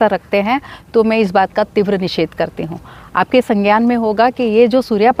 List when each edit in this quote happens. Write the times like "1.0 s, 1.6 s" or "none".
none